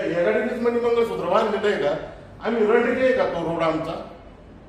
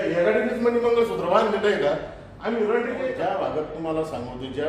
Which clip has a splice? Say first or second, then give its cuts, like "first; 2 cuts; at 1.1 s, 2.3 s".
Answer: second; 1 cut; at 3.1 s